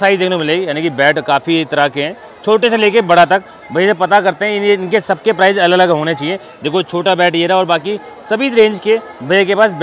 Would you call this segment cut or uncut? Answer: uncut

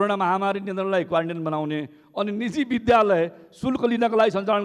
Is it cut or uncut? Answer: uncut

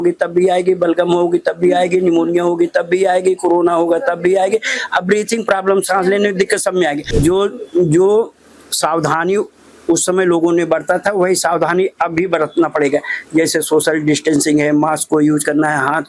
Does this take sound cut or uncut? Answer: cut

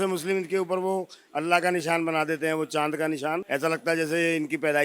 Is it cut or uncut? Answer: cut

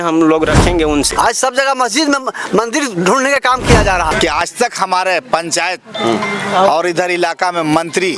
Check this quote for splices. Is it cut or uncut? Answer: cut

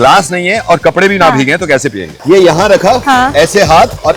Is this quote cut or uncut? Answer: cut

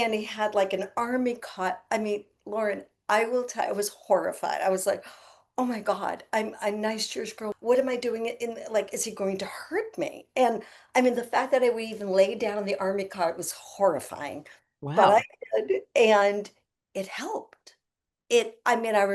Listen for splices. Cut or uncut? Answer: cut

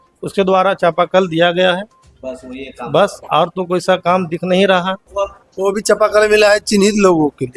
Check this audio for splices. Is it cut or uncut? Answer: cut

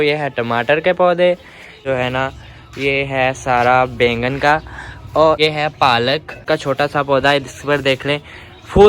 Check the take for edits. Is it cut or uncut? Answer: cut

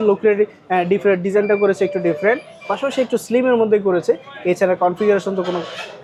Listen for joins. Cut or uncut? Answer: uncut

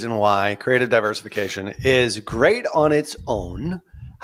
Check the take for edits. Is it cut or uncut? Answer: uncut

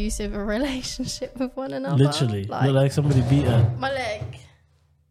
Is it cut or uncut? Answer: uncut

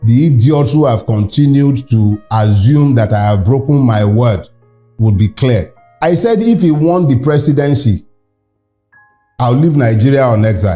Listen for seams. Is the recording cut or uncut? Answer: uncut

